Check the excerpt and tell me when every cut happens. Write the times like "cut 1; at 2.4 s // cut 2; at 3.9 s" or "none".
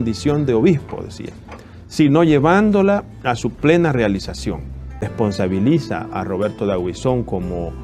cut 1; at 5.1 s